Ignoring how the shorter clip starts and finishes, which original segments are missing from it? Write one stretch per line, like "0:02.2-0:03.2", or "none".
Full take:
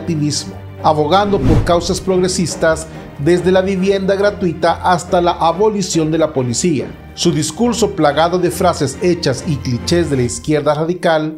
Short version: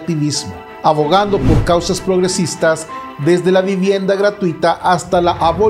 none